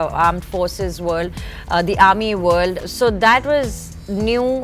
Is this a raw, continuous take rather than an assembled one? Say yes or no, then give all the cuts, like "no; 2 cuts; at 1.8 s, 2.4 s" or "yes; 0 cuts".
no; 1 cut; at 2.8 s